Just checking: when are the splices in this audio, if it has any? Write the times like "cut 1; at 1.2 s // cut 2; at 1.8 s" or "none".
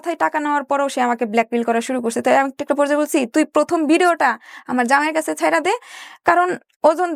none